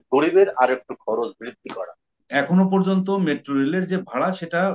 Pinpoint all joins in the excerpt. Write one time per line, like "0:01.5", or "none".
0:02.2